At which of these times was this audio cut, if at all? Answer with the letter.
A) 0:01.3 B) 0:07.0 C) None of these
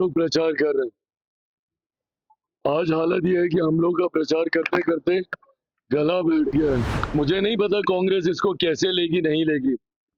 B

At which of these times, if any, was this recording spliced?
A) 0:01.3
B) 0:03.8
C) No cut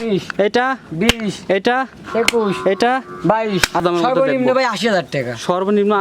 B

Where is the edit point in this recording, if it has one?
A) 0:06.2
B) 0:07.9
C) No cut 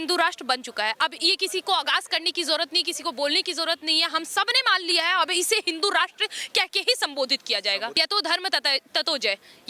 B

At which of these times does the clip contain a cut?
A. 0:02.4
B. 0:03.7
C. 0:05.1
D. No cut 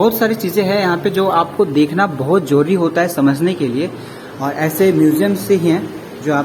D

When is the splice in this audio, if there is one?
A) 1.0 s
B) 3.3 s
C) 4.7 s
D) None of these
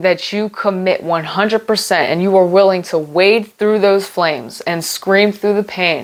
D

